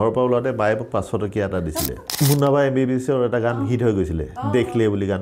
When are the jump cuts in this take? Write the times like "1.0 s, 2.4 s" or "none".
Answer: 2.0 s

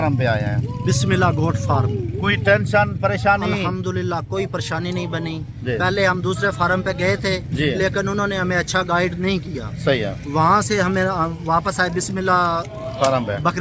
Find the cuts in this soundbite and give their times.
none

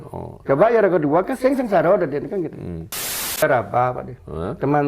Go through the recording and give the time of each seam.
3.4 s

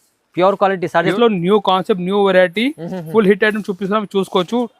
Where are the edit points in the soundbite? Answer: 1.1 s

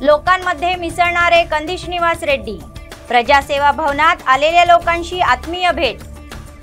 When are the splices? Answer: none

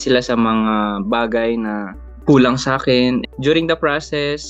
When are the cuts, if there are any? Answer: 3.2 s

